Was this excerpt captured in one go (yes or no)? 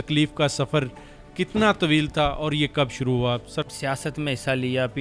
no